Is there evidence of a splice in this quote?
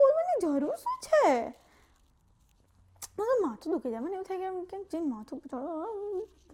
no; 0 cuts

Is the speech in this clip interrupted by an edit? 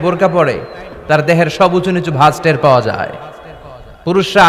no; 0 cuts

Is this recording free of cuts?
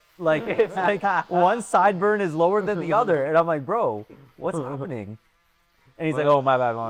yes; 0 cuts

